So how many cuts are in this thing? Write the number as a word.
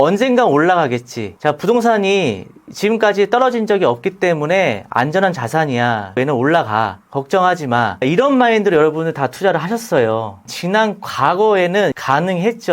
four